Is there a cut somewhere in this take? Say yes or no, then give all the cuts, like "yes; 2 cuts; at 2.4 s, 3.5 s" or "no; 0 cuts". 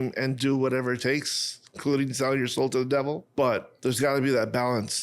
yes; 1 cut; at 3.2 s